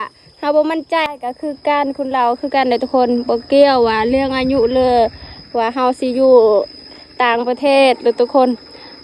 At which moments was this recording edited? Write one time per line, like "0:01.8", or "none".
0:01.1